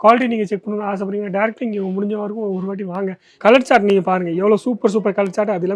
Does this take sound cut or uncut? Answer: cut